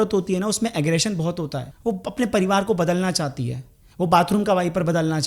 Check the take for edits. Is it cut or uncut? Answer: cut